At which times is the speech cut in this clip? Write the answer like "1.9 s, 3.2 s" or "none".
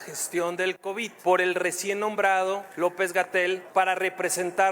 1.1 s, 2.7 s, 3.6 s